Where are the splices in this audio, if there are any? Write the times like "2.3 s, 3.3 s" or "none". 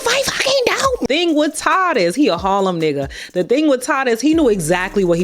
1.0 s

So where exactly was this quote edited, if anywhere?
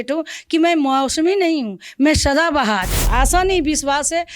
2.9 s

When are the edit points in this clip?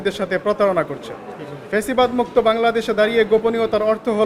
none

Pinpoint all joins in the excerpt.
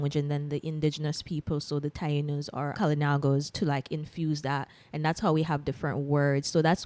2.7 s

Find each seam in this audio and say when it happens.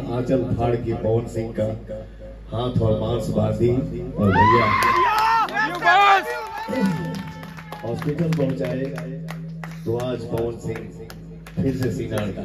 none

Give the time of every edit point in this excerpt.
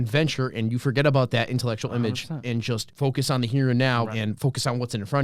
2.9 s, 4.1 s

